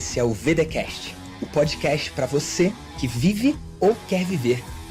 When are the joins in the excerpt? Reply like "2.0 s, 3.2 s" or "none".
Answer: none